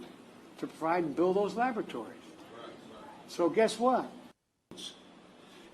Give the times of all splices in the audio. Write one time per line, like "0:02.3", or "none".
0:04.6

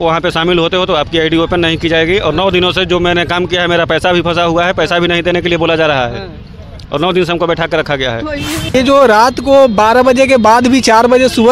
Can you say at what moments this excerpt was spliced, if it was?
0:08.7

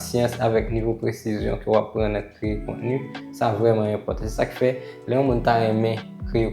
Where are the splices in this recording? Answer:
none

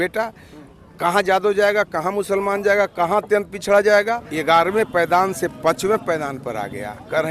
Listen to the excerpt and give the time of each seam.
0:04.3

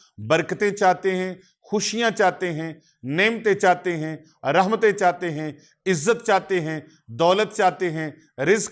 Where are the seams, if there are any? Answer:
none

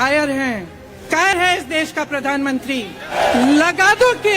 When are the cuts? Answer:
0:01.3
0:03.1

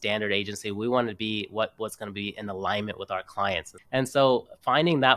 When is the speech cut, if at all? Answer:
0:03.7

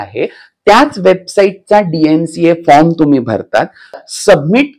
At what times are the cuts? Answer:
0:03.8

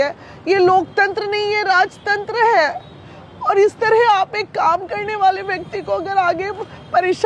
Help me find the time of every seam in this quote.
none

